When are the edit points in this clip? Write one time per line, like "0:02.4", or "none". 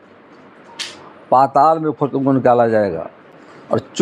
none